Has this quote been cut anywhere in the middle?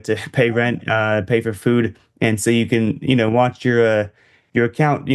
no; 0 cuts

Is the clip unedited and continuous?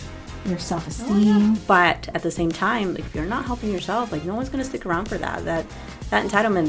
no; 1 cut; at 1.6 s

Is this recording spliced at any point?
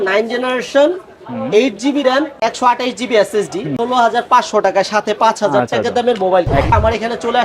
yes; 2 cuts; at 3.7 s, 6.7 s

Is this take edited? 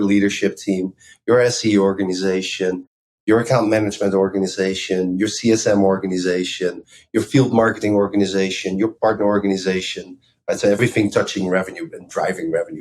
yes; 3 cuts; at 6.9 s, 8.9 s, 10.8 s

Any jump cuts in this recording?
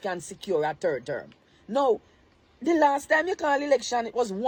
no; 0 cuts

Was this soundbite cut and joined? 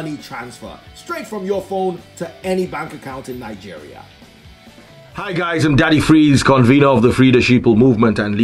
yes; 1 cut; at 5.3 s

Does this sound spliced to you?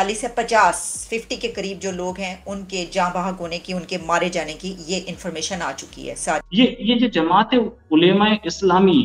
yes; 1 cut; at 6.4 s

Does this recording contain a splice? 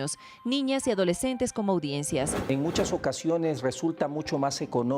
yes; 1 cut; at 2.4 s

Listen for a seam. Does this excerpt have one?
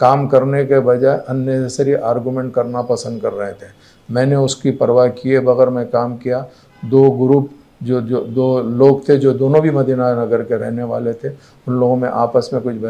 no; 0 cuts

